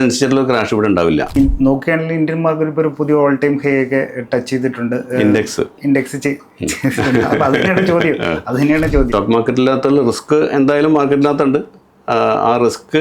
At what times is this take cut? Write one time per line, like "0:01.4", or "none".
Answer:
0:01.3
0:09.1